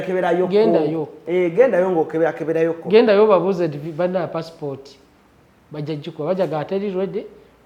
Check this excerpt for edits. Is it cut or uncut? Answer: uncut